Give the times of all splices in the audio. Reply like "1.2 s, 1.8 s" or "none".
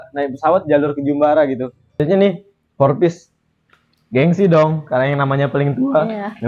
2.0 s